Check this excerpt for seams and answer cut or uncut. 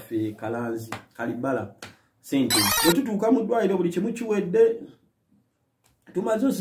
cut